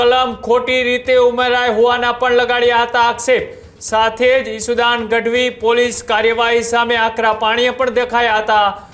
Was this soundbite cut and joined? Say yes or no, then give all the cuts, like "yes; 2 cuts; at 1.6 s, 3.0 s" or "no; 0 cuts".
no; 0 cuts